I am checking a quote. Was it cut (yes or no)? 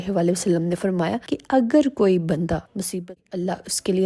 yes